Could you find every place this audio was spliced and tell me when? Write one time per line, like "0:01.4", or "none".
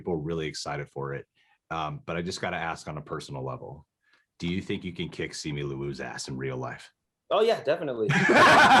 none